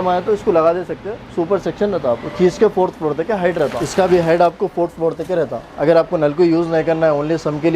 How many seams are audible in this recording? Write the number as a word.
one